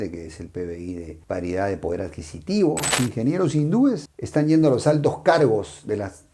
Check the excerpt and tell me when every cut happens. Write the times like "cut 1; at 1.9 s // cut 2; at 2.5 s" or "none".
cut 1; at 2.9 s